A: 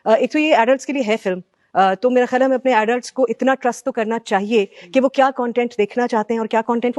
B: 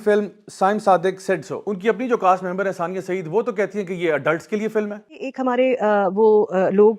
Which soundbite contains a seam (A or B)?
B